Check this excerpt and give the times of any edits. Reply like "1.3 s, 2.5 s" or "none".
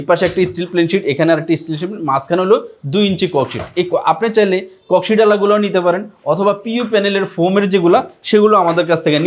none